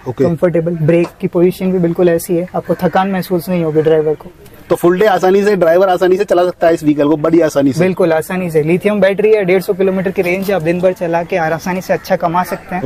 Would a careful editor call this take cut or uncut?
uncut